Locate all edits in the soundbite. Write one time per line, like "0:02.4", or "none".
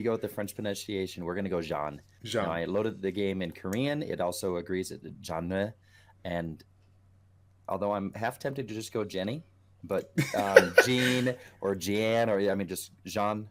none